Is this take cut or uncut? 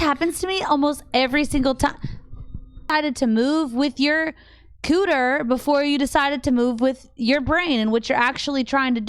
cut